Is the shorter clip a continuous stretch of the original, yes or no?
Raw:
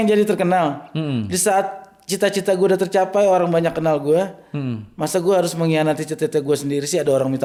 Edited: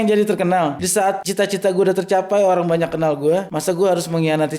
no